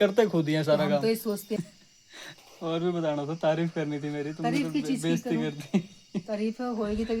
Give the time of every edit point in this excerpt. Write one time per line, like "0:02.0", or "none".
0:01.6